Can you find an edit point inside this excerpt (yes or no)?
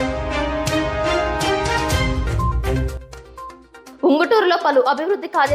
yes